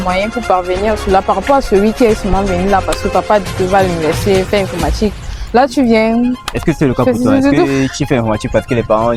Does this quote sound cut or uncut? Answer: uncut